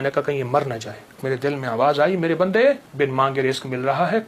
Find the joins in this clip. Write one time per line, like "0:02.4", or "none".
0:01.2
0:02.9